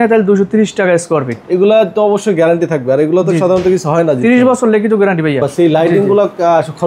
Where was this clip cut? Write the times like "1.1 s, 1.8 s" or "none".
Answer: 1.4 s, 5.5 s